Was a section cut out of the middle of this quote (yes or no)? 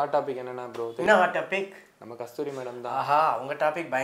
yes